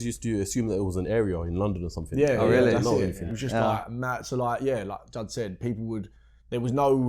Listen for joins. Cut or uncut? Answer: uncut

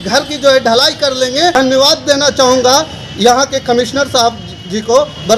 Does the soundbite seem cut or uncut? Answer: cut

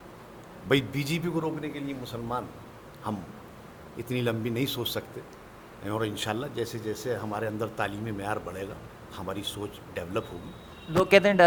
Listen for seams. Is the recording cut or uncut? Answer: uncut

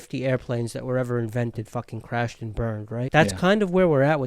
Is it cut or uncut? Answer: cut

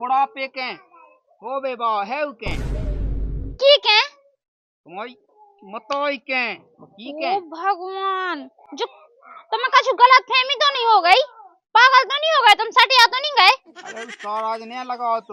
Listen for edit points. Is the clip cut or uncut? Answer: uncut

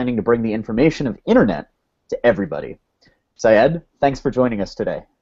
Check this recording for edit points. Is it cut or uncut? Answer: uncut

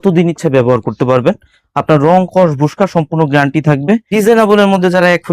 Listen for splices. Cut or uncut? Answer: cut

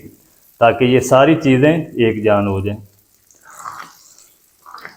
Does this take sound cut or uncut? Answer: uncut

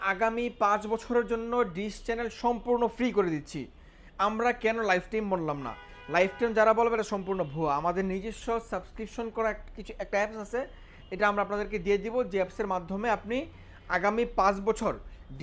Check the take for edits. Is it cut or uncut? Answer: uncut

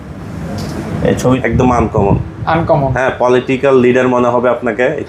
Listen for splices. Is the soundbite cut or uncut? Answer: cut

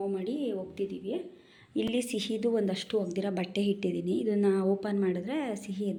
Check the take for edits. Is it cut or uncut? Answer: uncut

